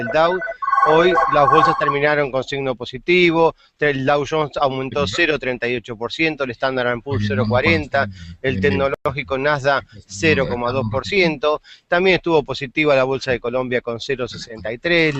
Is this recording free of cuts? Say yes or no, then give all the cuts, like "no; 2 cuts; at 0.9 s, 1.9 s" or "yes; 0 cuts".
no; 1 cut; at 9.6 s